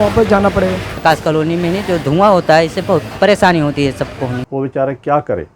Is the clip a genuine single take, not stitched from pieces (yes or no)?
no